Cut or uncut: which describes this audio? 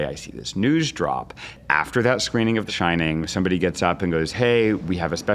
cut